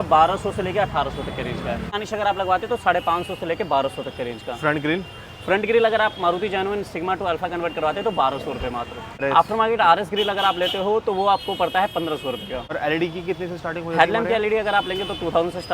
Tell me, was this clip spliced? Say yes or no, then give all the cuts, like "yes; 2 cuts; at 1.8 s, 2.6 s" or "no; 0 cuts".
yes; 3 cuts; at 1.9 s, 9.2 s, 12.7 s